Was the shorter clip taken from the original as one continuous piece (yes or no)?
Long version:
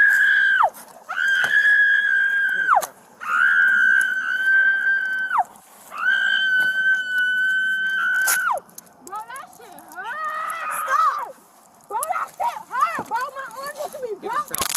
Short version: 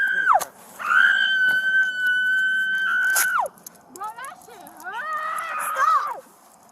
no